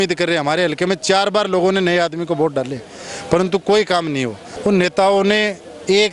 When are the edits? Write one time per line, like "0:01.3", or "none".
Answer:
0:04.4